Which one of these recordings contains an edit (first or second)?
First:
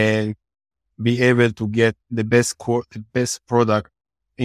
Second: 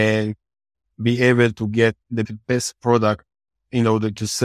second